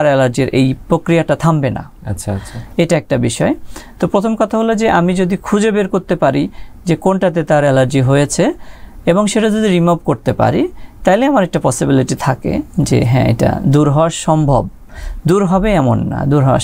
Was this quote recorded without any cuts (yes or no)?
yes